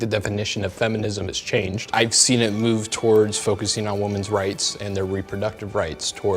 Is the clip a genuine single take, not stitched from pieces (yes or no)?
no